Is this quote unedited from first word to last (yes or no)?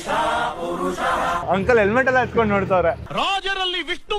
yes